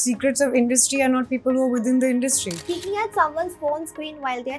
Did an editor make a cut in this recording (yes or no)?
yes